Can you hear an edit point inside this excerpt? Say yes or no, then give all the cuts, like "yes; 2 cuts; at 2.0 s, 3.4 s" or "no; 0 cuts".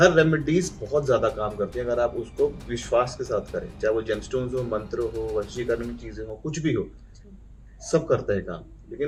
no; 0 cuts